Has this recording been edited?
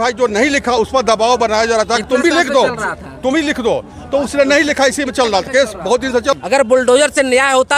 yes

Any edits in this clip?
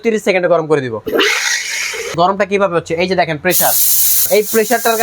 yes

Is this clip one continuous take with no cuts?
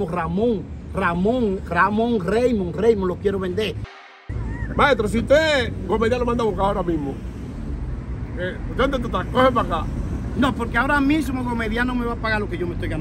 no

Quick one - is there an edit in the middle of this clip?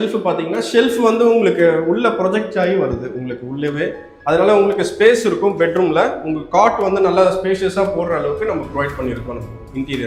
no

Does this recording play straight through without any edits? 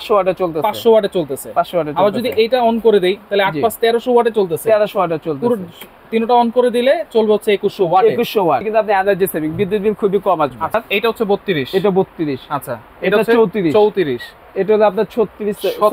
no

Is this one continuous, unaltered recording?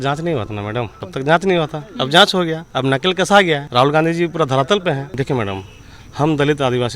no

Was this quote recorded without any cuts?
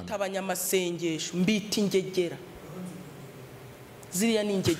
yes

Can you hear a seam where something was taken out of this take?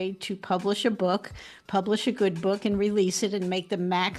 no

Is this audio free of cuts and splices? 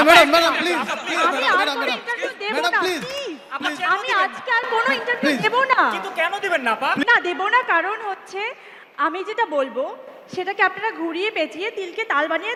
yes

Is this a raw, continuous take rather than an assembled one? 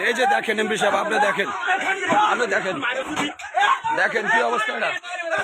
yes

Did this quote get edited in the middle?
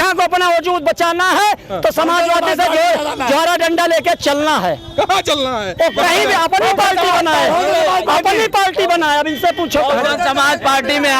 no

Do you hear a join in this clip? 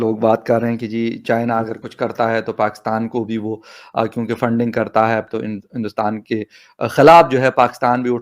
no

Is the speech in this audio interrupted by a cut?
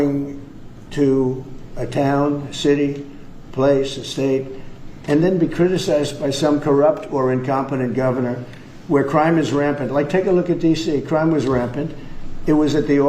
no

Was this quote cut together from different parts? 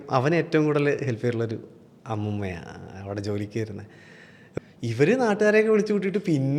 yes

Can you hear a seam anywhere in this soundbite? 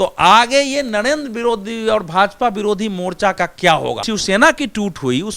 yes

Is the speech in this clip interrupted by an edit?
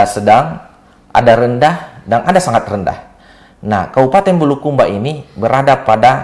no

